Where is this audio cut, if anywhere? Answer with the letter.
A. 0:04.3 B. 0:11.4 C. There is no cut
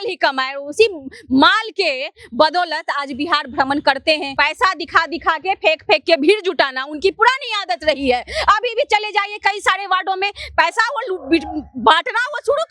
A